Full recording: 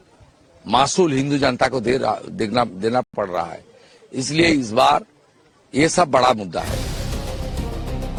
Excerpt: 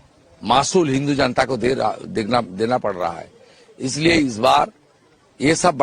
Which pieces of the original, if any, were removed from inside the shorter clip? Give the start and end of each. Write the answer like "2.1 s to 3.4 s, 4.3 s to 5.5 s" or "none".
3.0 s to 3.2 s